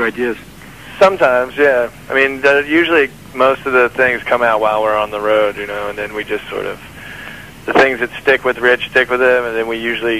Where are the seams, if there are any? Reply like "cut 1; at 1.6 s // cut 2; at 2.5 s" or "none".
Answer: cut 1; at 3.2 s